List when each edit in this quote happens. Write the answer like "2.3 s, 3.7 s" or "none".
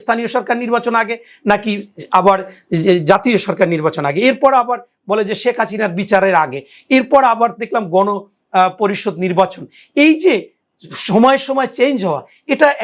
none